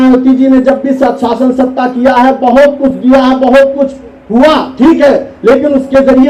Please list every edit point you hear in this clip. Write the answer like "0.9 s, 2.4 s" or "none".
none